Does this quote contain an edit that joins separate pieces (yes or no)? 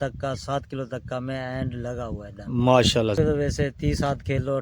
yes